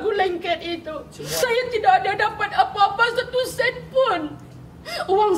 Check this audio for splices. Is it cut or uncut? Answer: cut